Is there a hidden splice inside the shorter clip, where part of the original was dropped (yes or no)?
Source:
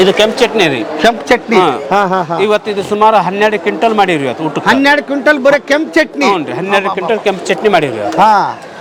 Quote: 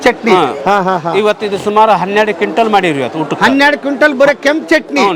no